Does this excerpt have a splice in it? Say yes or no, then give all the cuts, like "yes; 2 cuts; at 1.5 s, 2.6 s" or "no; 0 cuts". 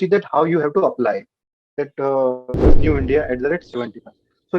yes; 1 cut; at 2.7 s